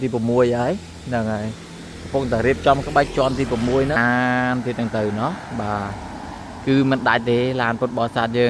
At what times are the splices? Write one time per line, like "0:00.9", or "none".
0:04.0